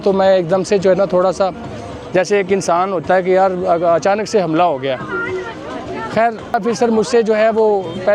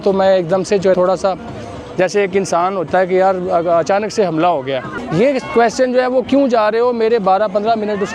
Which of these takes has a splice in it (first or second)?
second